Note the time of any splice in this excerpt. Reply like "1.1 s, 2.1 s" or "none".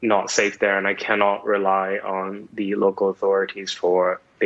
none

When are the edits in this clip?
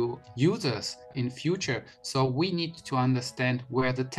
1.1 s, 2.8 s

